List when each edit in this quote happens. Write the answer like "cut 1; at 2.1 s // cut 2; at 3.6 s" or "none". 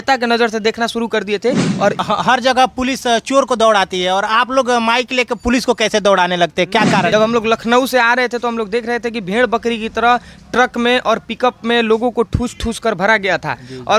cut 1; at 2.0 s // cut 2; at 7.1 s